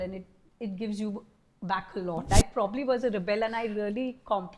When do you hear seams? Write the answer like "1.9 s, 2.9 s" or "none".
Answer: 2.3 s